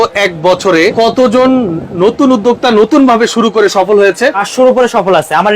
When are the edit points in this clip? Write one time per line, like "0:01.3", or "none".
0:00.9
0:04.4